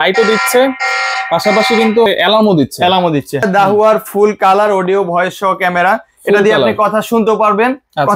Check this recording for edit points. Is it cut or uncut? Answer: cut